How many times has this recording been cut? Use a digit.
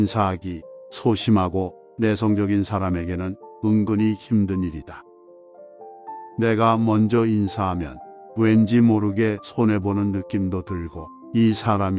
2